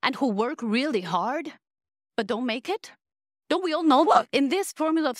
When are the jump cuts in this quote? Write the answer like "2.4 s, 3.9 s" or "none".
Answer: 4.2 s